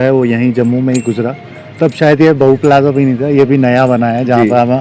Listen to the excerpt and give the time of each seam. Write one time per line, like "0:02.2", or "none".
none